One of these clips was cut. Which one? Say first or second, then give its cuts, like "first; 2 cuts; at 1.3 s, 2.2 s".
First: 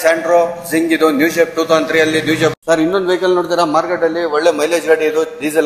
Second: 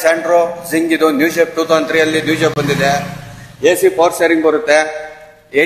first; 1 cut; at 2.6 s